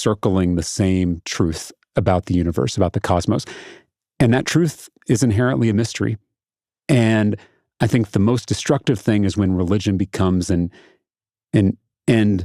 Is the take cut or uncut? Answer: cut